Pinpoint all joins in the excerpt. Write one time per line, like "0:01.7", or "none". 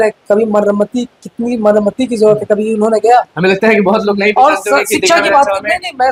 none